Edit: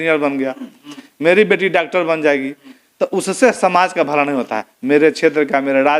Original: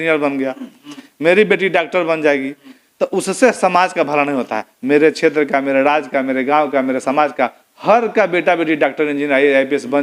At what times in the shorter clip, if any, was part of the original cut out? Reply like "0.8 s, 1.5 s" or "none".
none